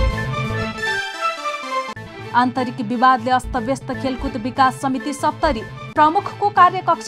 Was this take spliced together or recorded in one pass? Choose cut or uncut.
cut